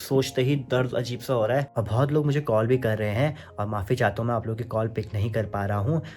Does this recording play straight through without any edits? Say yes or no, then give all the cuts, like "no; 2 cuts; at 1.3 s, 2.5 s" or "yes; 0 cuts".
no; 1 cut; at 1.7 s